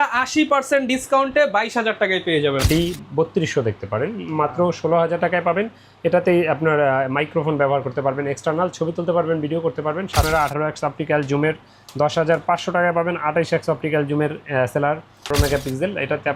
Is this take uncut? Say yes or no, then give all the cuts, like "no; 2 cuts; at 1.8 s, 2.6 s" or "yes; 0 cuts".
no; 3 cuts; at 2.6 s, 10.2 s, 15.3 s